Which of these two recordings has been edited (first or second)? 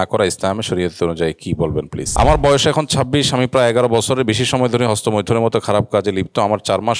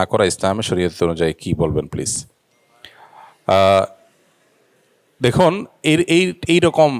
first